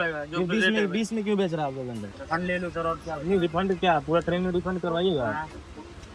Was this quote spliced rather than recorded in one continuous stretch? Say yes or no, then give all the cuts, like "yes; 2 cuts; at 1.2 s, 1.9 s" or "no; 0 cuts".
yes; 1 cut; at 2.1 s